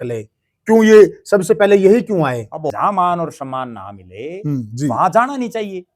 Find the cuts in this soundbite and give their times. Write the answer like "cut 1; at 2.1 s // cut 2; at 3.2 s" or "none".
cut 1; at 2.7 s